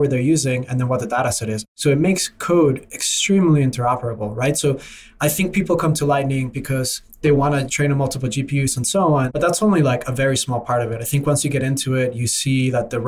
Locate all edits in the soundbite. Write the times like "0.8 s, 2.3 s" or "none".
1.7 s, 7.7 s, 9.3 s